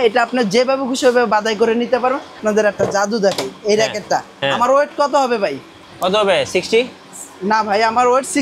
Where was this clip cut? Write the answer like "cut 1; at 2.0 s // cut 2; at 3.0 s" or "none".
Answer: cut 1; at 2.4 s